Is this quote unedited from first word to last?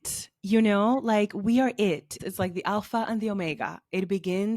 no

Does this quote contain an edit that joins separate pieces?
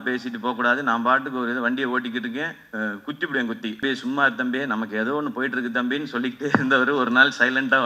yes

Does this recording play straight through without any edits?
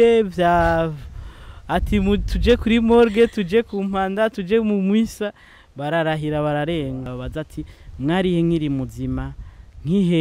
no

